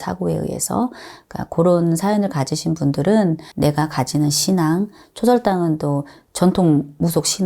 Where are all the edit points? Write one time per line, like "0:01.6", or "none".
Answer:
0:03.5